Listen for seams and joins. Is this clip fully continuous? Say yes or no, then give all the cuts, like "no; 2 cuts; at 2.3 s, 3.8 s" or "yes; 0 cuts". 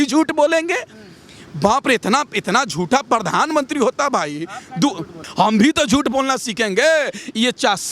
yes; 0 cuts